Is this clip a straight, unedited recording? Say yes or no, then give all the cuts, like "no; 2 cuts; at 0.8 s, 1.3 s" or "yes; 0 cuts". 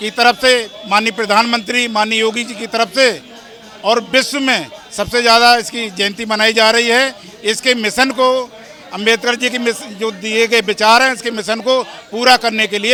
yes; 0 cuts